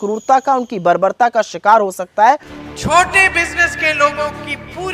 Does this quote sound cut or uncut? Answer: cut